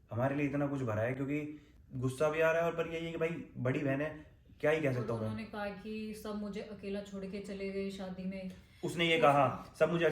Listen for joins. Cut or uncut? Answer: cut